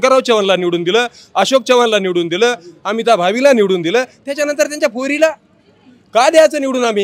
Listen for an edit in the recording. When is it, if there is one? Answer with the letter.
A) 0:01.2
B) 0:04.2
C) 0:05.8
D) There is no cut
D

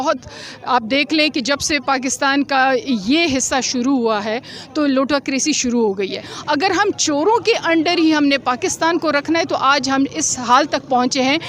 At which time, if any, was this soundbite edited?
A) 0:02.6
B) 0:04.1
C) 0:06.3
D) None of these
C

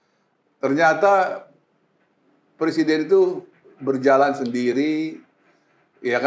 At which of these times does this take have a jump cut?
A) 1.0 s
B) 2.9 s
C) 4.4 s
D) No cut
D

